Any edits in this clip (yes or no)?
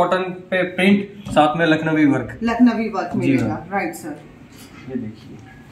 no